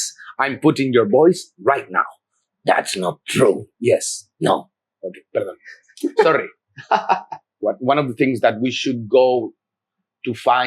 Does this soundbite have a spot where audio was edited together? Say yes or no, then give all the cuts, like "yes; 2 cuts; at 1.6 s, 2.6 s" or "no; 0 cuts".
yes; 1 cut; at 7.5 s